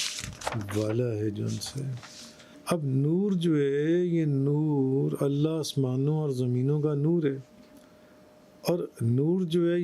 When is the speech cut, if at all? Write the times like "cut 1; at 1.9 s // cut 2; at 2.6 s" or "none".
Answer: cut 1; at 2.5 s

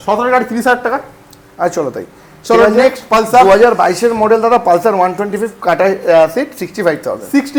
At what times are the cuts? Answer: none

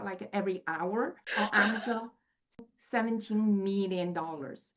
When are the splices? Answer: cut 1; at 1.2 s // cut 2; at 2.6 s

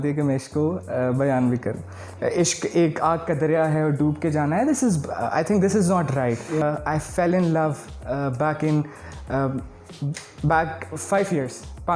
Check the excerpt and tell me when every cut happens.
cut 1; at 2.1 s // cut 2; at 6.6 s

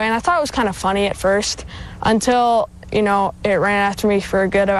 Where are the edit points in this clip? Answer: none

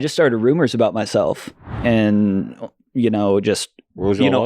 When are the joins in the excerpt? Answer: cut 1; at 1.7 s

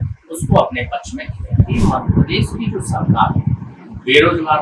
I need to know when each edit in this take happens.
cut 1; at 1.8 s

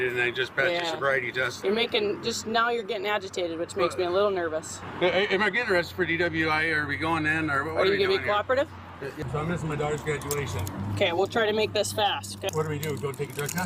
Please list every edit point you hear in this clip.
cut 1; at 1.5 s // cut 2; at 4.8 s // cut 3; at 9.2 s // cut 4; at 12.5 s

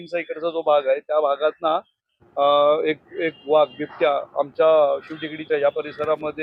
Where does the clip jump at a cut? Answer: none

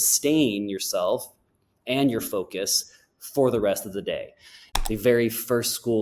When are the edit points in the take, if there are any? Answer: cut 1; at 4.6 s

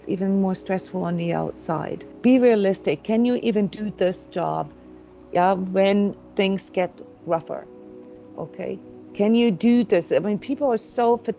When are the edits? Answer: cut 1; at 2.0 s

